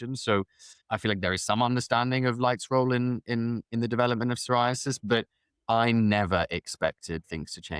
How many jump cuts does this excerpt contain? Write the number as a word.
zero